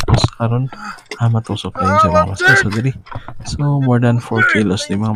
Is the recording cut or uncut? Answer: uncut